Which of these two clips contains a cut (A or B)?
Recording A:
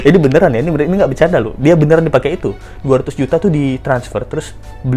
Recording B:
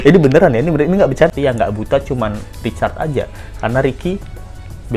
B